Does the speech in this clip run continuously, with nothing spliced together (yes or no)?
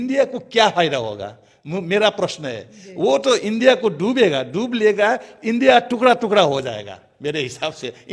yes